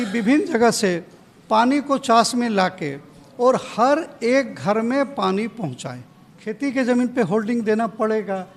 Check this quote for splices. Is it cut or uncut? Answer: cut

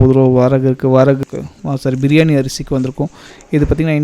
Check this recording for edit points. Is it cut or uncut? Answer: cut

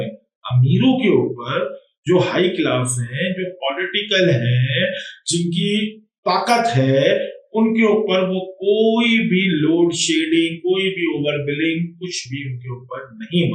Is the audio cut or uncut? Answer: uncut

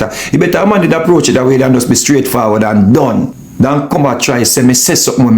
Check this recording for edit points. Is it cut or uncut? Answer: cut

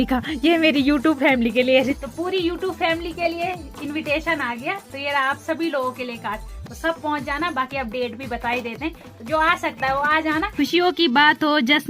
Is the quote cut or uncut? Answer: cut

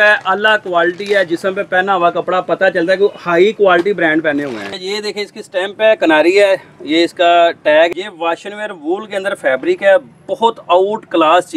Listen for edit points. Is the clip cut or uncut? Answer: cut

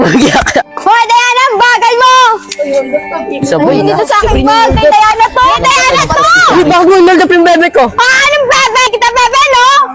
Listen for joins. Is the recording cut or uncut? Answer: cut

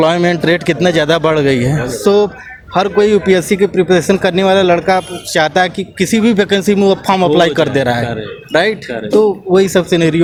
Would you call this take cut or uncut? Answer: uncut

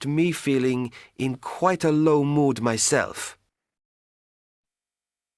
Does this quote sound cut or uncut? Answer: uncut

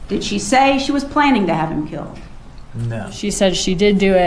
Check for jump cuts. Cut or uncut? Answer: cut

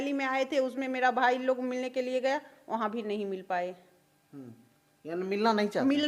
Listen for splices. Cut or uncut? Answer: uncut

